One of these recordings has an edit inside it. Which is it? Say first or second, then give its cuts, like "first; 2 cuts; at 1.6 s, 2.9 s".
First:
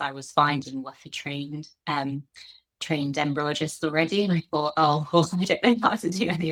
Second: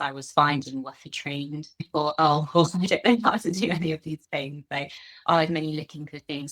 second; 1 cut; at 1.8 s